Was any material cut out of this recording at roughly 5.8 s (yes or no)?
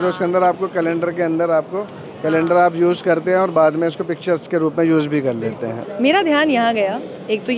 yes